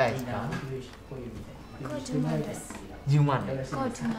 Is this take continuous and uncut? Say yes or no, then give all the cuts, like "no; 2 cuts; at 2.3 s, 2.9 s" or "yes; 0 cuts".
yes; 0 cuts